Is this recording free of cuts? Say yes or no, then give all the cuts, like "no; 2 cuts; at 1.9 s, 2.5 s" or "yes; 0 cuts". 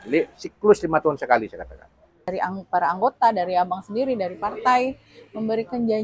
no; 1 cut; at 2.3 s